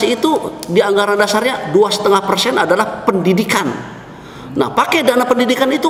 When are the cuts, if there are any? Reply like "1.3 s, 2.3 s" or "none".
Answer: none